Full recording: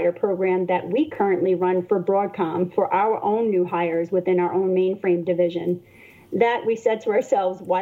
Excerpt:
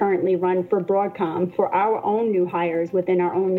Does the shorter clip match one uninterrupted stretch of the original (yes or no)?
yes